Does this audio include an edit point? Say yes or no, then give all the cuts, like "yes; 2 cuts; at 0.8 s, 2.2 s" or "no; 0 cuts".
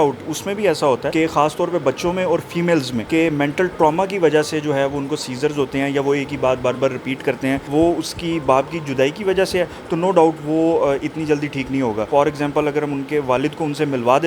yes; 4 cuts; at 1.1 s, 3.0 s, 7.6 s, 12.1 s